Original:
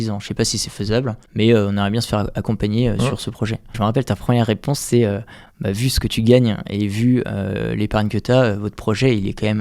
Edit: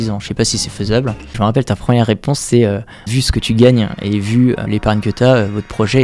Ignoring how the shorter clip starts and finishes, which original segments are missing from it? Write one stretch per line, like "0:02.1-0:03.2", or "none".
0:01.2-0:03.6
0:05.5-0:05.8
0:07.3-0:07.7